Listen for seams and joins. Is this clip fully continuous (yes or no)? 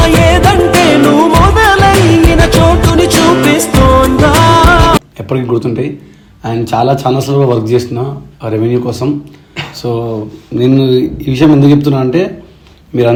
yes